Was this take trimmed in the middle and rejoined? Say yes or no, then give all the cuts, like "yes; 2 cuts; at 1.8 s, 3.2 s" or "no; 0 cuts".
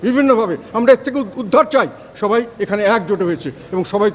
no; 0 cuts